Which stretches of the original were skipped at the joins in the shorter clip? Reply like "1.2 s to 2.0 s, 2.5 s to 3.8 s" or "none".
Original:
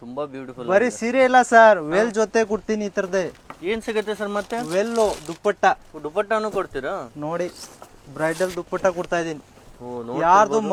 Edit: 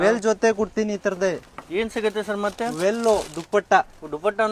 none